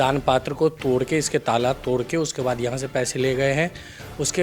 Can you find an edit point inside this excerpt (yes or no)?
no